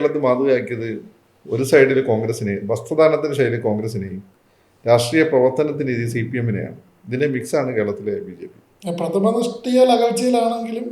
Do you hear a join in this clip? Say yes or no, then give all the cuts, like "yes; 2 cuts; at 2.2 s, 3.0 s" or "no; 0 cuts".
no; 0 cuts